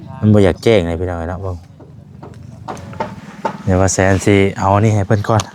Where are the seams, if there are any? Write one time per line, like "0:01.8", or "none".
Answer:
0:02.9